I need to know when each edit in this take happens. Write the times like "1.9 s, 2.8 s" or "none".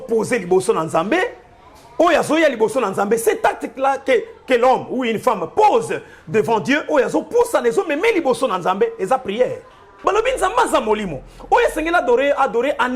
10.0 s